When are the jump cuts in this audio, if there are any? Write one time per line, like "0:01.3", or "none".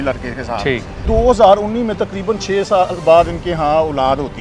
0:01.0